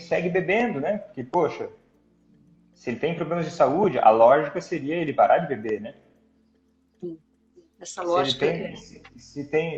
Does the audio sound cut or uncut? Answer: uncut